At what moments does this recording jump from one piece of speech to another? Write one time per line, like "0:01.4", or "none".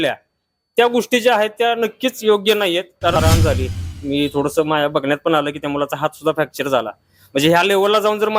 0:03.2